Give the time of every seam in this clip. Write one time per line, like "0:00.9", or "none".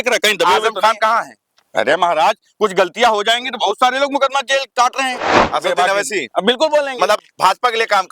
0:05.4

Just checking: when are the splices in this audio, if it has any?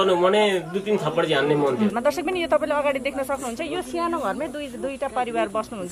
0:01.9

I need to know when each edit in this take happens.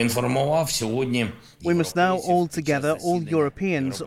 none

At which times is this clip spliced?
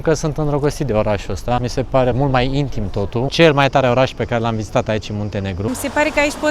0:02.0
0:03.3
0:05.7

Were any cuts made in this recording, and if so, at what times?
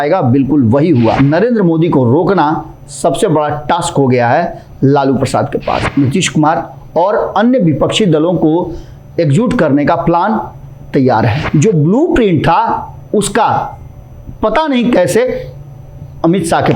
0:01.2
0:05.9
0:11.4

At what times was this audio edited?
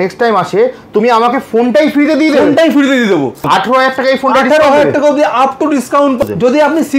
0:03.4
0:06.2

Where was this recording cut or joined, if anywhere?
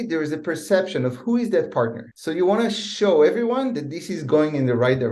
none

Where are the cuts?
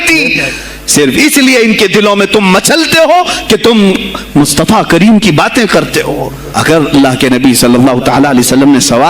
0:06.4

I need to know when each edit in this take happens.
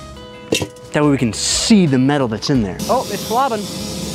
0:02.8

